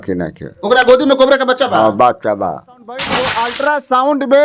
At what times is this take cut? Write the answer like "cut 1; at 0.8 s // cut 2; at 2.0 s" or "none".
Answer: cut 1; at 3.1 s